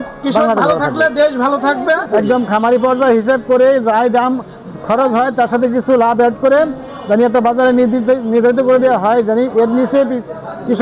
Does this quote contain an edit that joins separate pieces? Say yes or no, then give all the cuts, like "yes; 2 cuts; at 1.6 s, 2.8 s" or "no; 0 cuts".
yes; 1 cut; at 2.1 s